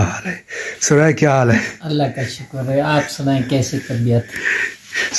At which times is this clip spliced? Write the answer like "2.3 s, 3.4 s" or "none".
none